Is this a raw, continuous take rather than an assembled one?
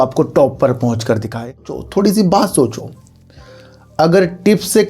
no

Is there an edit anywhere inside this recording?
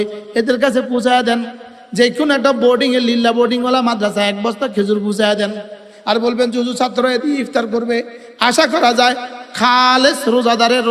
no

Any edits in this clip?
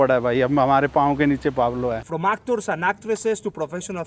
yes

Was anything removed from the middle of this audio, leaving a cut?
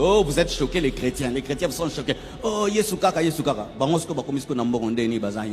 no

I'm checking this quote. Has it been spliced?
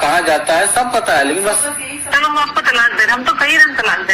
yes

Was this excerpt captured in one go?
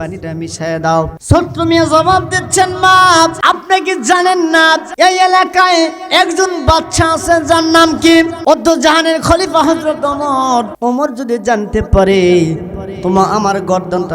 no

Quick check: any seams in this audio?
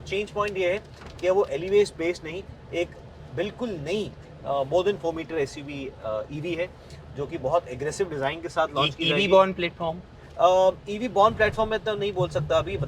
no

